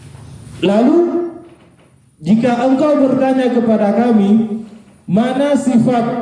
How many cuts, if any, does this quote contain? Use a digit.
0